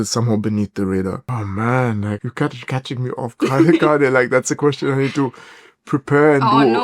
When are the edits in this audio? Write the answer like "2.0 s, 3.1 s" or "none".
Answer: 1.3 s, 2.3 s